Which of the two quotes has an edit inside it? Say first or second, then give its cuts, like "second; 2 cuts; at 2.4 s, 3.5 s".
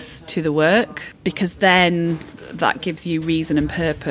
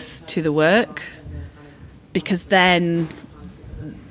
first; 2 cuts; at 1.0 s, 2.4 s